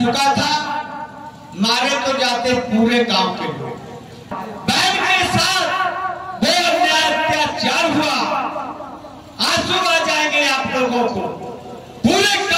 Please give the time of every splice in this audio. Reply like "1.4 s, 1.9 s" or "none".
4.3 s

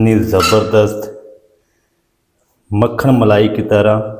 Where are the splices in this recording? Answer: none

